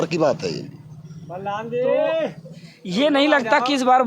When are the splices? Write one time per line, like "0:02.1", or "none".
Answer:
none